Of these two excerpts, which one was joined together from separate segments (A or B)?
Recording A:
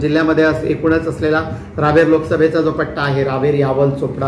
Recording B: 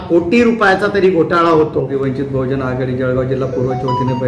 B